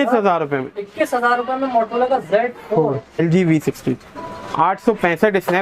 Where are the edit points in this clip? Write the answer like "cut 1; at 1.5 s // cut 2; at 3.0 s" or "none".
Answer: cut 1; at 3.2 s